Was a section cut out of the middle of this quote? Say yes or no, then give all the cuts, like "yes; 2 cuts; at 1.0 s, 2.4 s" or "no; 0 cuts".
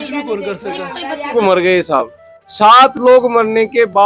yes; 1 cut; at 1.3 s